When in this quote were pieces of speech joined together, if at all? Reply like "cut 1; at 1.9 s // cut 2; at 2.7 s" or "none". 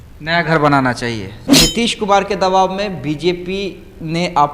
cut 1; at 1.4 s